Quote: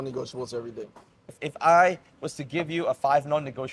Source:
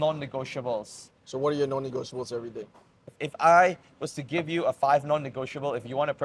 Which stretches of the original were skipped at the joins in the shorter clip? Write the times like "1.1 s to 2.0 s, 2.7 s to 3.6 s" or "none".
none